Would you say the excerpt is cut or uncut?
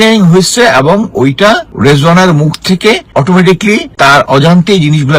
cut